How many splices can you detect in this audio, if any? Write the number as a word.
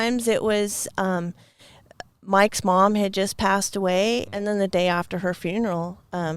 one